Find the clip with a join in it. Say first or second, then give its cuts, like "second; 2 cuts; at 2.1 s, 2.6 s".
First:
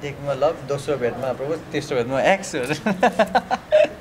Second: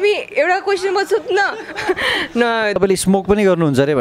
second; 1 cut; at 2.8 s